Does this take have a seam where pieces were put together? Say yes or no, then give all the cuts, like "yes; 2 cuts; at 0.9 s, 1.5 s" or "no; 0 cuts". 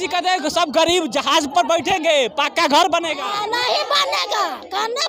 no; 0 cuts